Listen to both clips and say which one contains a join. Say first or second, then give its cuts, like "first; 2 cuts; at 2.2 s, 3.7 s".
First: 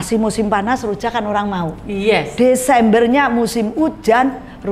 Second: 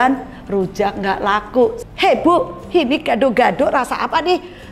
second; 1 cut; at 1.8 s